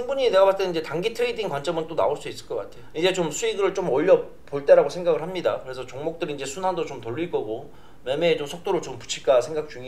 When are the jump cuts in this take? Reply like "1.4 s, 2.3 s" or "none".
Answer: 2.8 s